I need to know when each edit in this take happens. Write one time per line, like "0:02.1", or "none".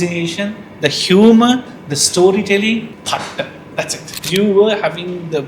0:03.0
0:04.2